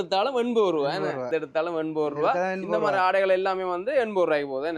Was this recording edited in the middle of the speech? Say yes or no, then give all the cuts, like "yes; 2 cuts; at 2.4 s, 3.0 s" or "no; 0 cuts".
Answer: yes; 1 cut; at 1.3 s